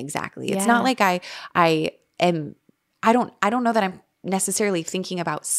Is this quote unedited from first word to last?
yes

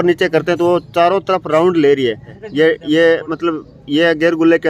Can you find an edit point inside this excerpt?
yes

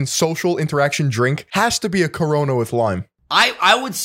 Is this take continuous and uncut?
no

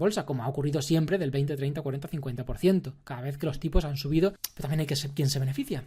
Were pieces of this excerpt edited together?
yes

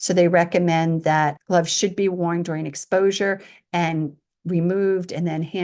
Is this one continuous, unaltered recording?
no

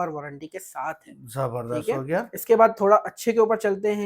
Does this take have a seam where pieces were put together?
no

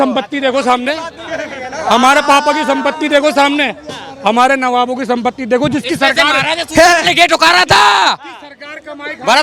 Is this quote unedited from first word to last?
yes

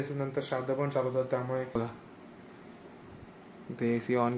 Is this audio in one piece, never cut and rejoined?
no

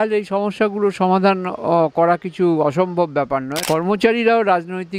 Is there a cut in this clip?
yes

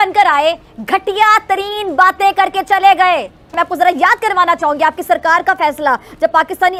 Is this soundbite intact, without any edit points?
yes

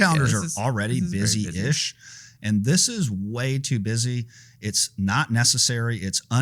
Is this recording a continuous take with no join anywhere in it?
yes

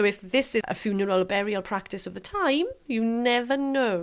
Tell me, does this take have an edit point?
no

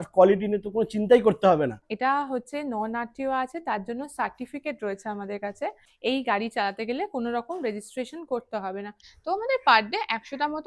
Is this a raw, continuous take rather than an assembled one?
no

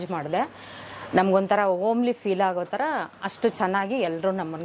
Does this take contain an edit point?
no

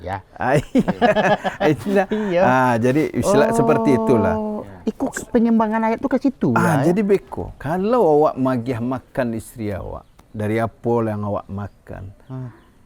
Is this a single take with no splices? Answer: yes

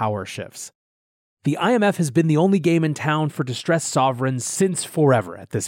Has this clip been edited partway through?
no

